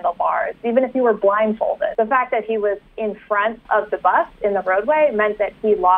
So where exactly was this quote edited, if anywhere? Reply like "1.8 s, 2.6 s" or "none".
1.9 s, 3.6 s